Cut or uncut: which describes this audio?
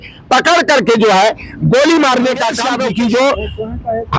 cut